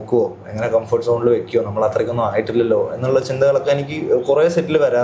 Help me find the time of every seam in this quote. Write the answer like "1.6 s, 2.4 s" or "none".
none